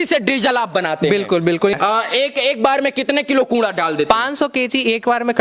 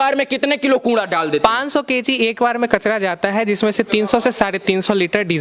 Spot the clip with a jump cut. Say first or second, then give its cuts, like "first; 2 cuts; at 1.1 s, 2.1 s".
first; 1 cut; at 1.7 s